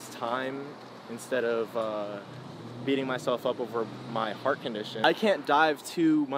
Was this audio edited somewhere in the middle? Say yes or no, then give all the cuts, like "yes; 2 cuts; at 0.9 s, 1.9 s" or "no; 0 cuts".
yes; 1 cut; at 5.0 s